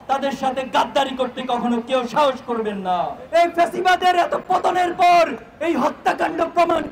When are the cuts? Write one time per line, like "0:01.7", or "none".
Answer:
0:03.2